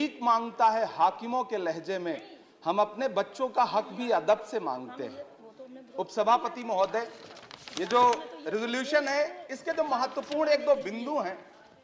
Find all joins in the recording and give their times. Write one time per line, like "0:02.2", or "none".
none